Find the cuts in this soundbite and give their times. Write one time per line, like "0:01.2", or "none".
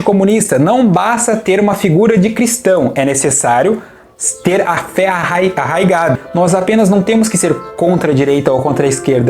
0:06.2

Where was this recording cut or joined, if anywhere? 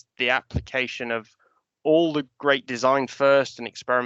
none

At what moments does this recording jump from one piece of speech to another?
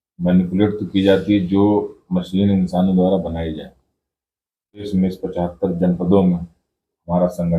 0:04.9

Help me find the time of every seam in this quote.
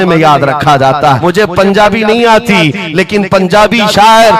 0:01.2

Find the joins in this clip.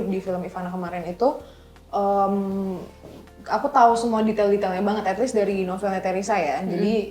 none

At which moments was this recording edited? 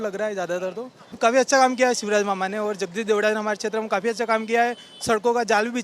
0:01.0

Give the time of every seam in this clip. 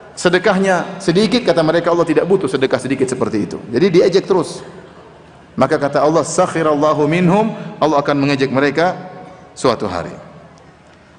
none

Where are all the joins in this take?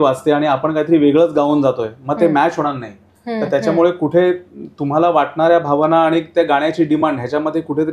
none

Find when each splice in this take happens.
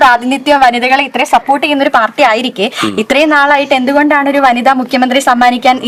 none

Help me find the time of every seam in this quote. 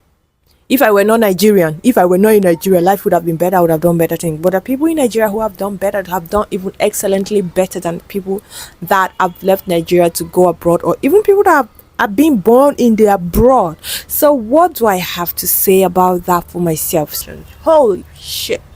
0:17.1

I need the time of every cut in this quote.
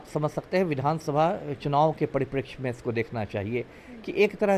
none

